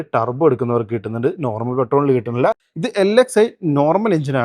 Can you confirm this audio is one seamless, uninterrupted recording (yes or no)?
no